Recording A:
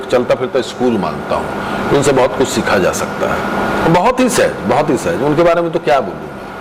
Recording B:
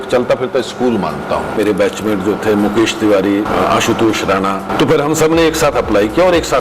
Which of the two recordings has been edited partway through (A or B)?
B